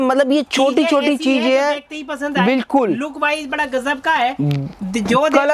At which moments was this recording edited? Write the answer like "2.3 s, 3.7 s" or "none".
none